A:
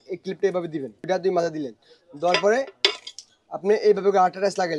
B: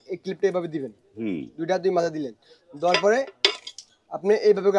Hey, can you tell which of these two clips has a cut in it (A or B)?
A